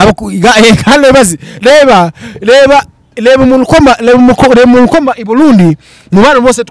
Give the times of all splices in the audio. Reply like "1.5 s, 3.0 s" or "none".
none